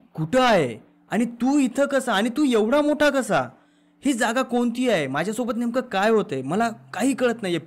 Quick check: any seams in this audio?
no; 0 cuts

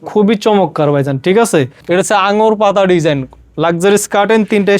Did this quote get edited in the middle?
yes; 1 cut; at 1.8 s

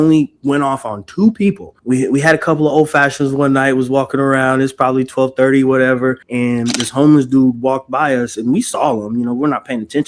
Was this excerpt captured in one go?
no; 2 cuts; at 1.7 s, 6.3 s

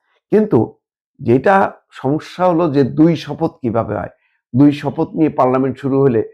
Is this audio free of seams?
yes; 0 cuts

